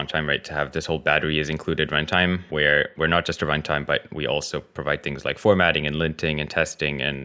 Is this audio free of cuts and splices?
yes; 0 cuts

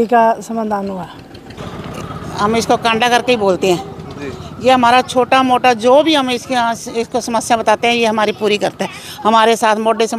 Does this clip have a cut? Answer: yes; 1 cut; at 1.5 s

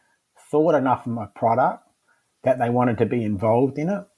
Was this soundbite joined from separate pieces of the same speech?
no; 0 cuts

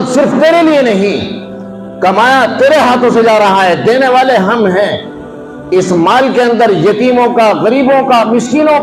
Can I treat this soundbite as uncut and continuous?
yes; 0 cuts

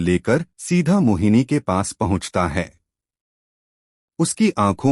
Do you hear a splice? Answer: no; 0 cuts

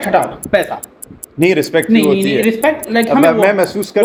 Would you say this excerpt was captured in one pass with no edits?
yes; 0 cuts

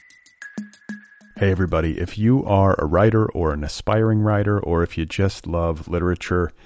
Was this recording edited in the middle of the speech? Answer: yes; 1 cut; at 0.9 s

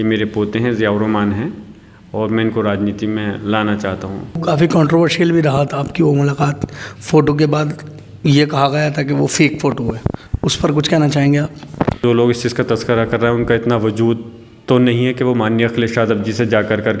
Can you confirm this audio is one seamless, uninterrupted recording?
no; 2 cuts; at 4.4 s, 12.0 s

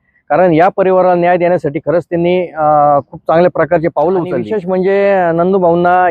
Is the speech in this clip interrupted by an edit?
yes; 1 cut; at 4.5 s

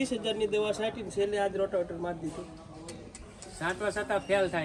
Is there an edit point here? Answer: no; 0 cuts

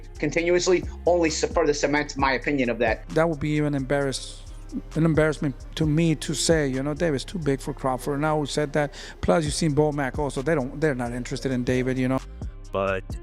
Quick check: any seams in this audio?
yes; 2 cuts; at 3.0 s, 12.2 s

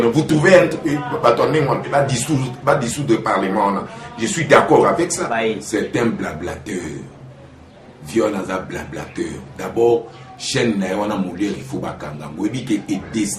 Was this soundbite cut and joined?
yes; 2 cuts; at 1.9 s, 5.4 s

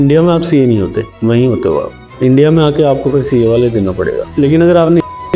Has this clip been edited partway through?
no; 0 cuts

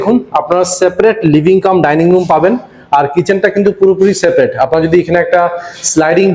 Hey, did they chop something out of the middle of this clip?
no; 0 cuts

